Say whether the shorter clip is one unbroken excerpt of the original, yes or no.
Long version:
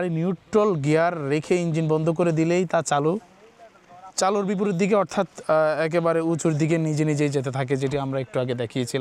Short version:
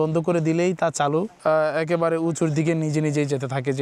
no